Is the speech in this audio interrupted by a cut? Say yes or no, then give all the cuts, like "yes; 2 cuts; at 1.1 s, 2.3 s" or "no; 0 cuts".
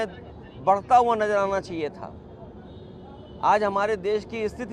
no; 0 cuts